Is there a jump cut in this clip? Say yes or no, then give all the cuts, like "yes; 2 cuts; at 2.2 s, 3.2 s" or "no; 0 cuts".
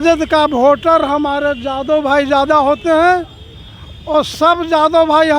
no; 0 cuts